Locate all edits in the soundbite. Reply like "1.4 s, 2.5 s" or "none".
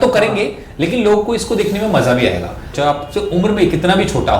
2.7 s